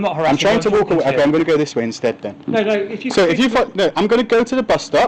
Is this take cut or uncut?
uncut